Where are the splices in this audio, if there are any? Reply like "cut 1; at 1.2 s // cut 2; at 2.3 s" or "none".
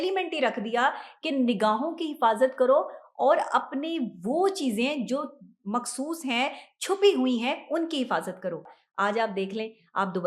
cut 1; at 8.8 s